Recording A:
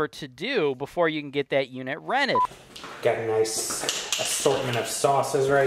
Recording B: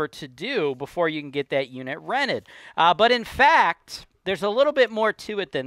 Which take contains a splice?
A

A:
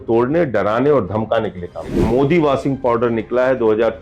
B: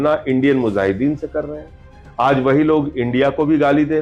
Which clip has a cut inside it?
A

